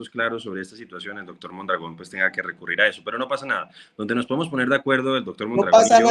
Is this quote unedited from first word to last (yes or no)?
yes